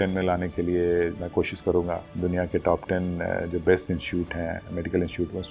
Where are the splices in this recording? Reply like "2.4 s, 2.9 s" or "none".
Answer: none